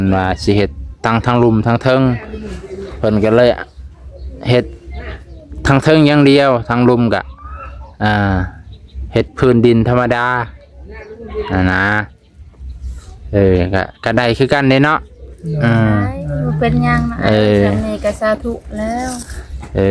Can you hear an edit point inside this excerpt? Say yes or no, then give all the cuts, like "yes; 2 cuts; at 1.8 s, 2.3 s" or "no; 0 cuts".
no; 0 cuts